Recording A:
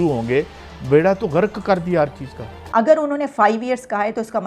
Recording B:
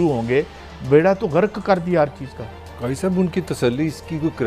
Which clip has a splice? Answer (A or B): A